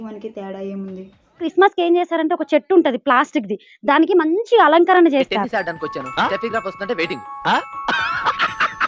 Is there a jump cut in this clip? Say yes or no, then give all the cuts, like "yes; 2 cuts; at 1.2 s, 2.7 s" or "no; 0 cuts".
yes; 1 cut; at 1.5 s